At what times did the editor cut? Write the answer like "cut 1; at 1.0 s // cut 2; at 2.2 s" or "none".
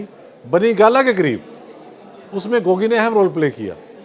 none